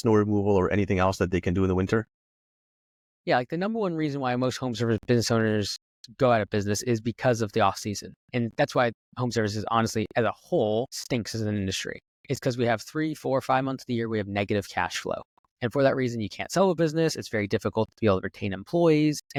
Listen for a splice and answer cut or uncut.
uncut